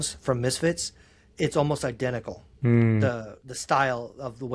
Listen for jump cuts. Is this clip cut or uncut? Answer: uncut